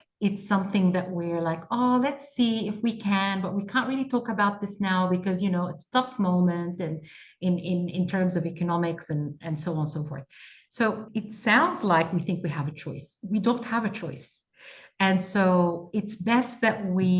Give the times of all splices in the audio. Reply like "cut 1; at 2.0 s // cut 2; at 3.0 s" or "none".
cut 1; at 11.0 s